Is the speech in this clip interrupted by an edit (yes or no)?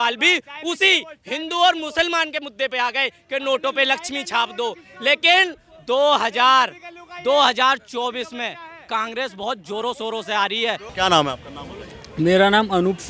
no